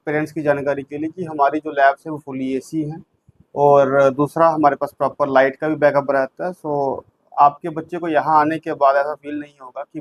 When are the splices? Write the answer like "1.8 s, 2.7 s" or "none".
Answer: none